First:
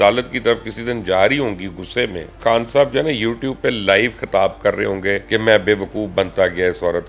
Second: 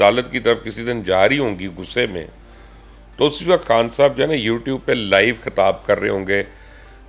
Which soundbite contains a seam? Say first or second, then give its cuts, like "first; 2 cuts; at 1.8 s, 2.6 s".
first; 2 cuts; at 2.4 s, 5.2 s